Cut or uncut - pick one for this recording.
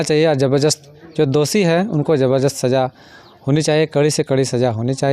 uncut